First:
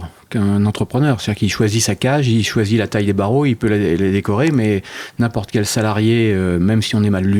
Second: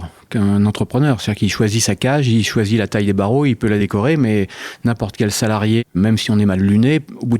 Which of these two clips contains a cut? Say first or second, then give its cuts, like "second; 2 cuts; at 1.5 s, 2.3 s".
second; 2 cuts; at 3.8 s, 5.9 s